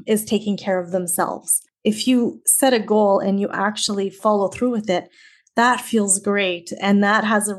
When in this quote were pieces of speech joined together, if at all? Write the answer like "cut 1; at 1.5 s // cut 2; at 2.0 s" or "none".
cut 1; at 1.6 s // cut 2; at 4.2 s